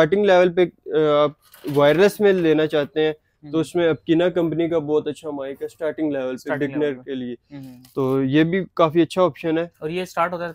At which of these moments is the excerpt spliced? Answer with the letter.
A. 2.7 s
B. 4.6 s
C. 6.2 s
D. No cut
D